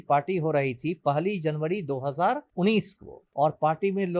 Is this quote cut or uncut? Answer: cut